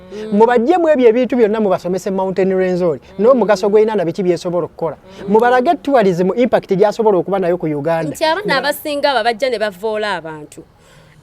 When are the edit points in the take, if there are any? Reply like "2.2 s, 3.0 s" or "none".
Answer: 8.1 s